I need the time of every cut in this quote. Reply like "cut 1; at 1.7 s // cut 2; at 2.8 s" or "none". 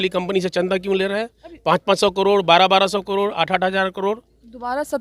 none